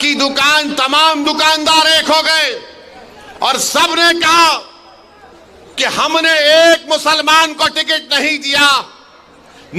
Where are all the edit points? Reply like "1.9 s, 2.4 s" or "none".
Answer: none